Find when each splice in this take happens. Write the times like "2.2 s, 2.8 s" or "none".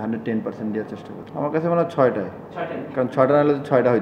1.2 s